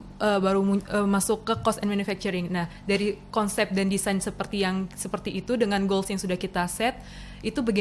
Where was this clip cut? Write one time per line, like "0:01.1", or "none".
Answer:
none